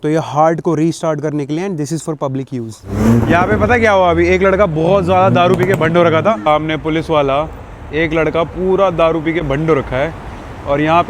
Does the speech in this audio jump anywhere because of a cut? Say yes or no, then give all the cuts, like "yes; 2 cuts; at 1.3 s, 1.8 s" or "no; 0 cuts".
yes; 2 cuts; at 2.8 s, 6.4 s